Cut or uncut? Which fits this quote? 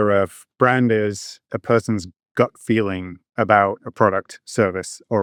uncut